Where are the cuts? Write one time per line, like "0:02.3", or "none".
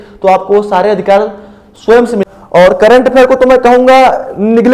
0:02.2

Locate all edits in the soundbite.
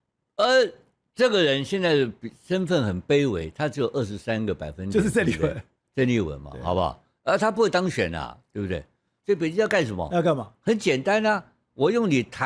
0:09.1

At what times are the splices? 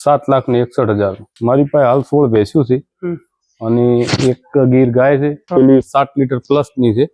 0:01.3
0:05.5

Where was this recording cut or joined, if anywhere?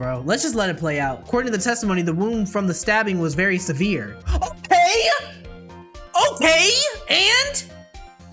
0:01.2

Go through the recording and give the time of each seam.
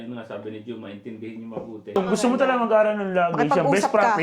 0:01.9

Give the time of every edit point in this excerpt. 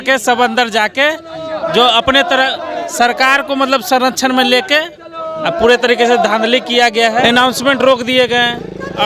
0:07.2

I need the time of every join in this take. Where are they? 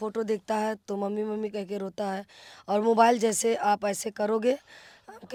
none

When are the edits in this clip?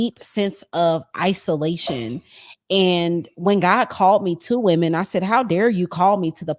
none

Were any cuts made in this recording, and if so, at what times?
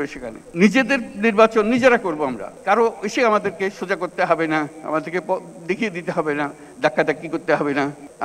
0:02.5

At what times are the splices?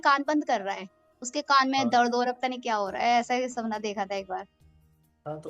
none

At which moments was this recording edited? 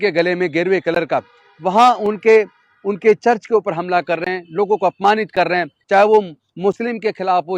0:05.8

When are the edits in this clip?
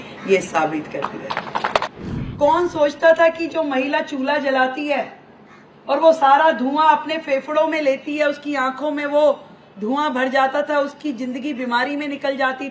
0:01.8

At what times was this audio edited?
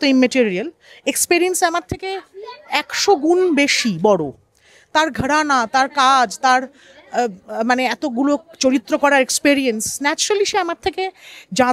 none

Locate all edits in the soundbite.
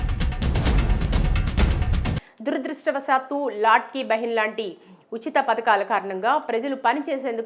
0:02.3

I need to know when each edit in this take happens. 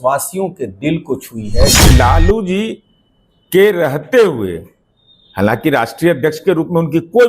0:01.8

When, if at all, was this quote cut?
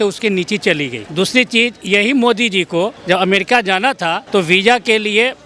0:01.0
0:03.0
0:04.2

